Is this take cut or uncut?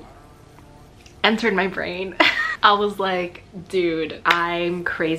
cut